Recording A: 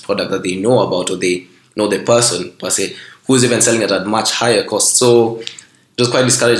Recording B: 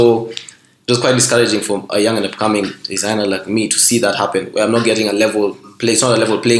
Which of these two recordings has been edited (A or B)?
B